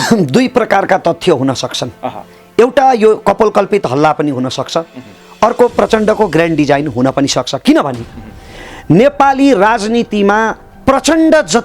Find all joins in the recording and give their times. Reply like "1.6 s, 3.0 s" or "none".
none